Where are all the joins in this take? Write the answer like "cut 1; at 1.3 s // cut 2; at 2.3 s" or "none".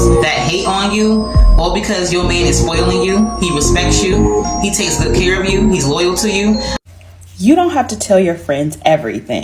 cut 1; at 6.8 s